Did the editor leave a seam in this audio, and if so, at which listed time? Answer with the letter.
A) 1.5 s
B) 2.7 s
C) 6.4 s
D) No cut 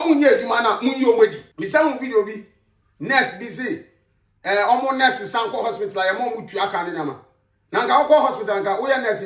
A